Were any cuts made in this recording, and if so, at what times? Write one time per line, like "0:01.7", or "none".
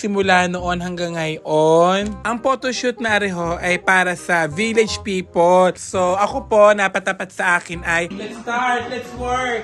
0:02.2
0:05.7
0:08.1